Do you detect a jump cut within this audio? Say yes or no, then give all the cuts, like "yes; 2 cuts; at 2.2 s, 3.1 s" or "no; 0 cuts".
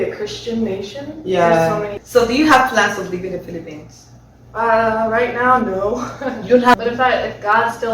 yes; 2 cuts; at 2.0 s, 6.7 s